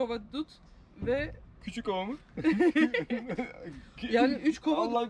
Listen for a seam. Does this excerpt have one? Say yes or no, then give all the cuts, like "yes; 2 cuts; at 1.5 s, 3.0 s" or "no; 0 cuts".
no; 0 cuts